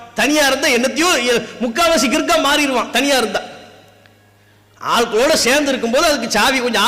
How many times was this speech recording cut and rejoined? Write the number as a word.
zero